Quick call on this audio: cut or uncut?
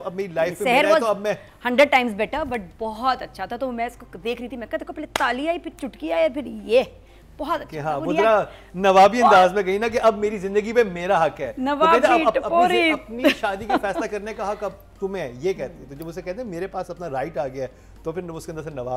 uncut